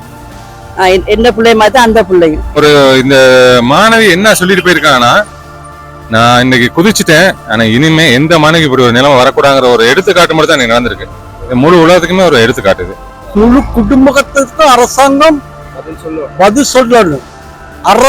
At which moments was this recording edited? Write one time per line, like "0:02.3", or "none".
0:02.5
0:13.4